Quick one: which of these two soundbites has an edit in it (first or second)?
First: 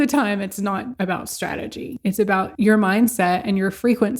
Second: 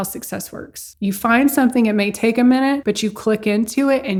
first